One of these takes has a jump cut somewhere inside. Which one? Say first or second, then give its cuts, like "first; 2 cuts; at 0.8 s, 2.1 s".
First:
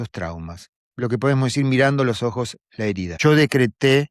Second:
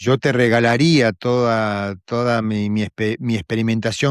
first; 1 cut; at 3.1 s